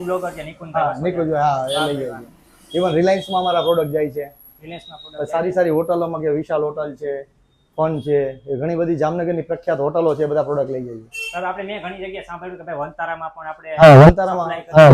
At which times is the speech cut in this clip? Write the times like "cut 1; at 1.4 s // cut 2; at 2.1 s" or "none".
none